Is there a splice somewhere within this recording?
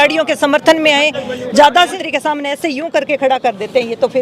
yes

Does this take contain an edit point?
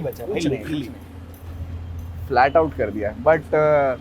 no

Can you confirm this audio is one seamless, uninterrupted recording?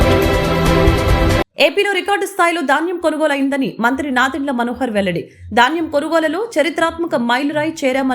no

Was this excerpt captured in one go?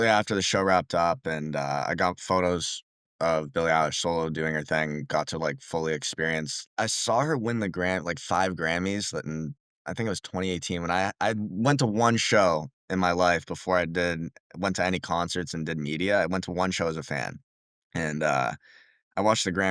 no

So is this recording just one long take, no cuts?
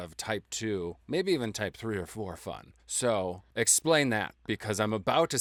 yes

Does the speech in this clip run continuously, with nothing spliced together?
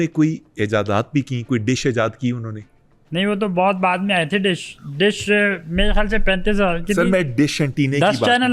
yes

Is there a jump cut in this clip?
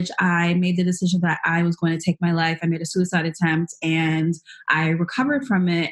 no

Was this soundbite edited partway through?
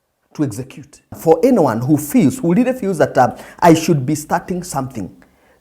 yes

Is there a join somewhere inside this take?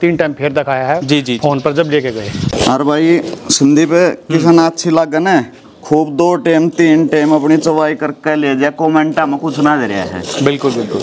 yes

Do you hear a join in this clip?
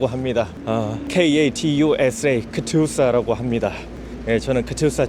yes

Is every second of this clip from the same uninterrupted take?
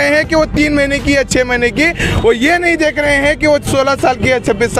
yes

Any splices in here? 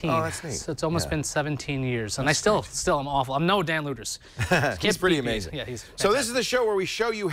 yes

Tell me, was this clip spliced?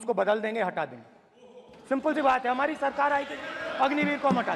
no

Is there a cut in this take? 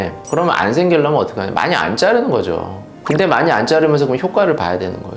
yes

